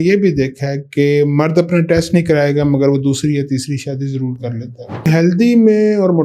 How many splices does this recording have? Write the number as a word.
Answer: one